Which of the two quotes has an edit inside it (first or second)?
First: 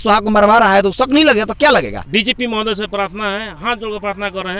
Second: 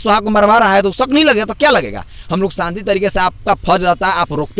first